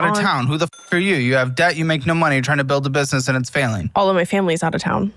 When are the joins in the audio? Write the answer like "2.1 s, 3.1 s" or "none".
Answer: none